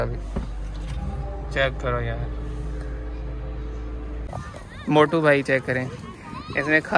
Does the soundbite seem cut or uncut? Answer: cut